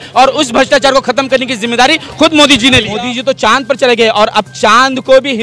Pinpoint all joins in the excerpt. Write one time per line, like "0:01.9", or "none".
0:03.0